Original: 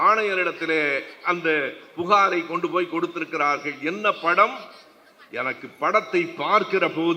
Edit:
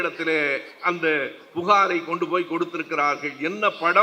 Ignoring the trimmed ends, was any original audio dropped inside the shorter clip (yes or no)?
no